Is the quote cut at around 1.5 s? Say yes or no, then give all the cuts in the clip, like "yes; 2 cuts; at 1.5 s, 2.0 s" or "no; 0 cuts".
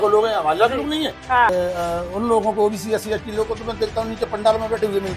yes; 1 cut; at 1.5 s